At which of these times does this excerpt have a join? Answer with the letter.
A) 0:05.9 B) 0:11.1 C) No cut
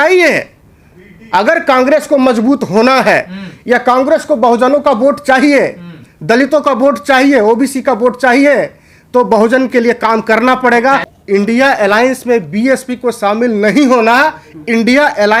B